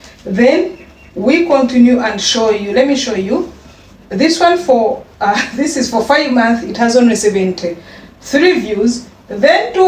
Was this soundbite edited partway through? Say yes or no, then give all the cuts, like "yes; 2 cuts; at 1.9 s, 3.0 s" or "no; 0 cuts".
no; 0 cuts